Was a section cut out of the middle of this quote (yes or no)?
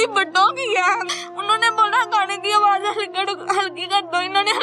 yes